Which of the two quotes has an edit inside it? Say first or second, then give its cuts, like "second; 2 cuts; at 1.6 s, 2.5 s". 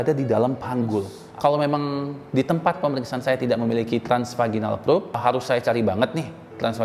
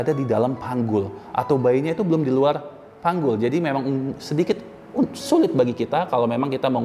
first; 2 cuts; at 1.2 s, 5.2 s